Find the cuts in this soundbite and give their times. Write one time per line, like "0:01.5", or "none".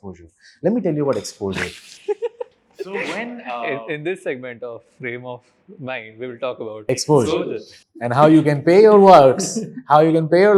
none